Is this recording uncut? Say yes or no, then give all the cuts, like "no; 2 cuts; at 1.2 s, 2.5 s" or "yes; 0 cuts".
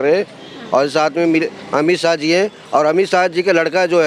yes; 0 cuts